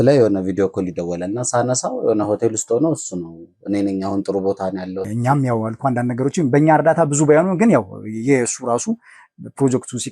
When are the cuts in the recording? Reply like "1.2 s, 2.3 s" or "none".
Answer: 5.1 s